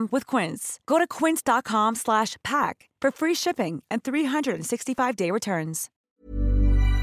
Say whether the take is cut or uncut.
cut